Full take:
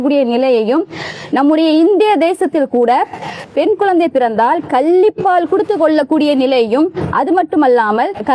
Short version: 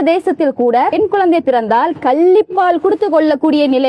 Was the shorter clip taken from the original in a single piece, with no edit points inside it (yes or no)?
no